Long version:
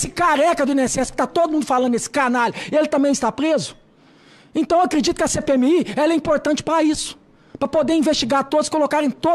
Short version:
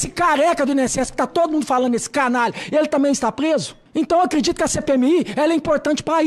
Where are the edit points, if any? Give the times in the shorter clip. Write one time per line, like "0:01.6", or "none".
0:03.8